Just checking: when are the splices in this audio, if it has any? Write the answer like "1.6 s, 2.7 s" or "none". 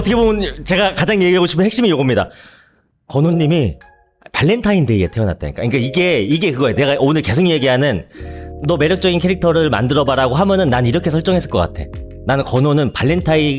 none